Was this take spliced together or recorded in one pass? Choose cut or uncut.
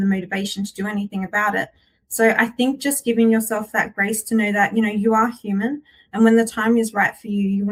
uncut